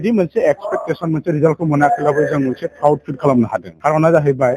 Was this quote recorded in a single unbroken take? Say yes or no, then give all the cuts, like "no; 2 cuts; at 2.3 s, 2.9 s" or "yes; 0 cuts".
no; 1 cut; at 3.7 s